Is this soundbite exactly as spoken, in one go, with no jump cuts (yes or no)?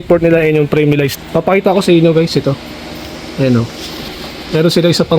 no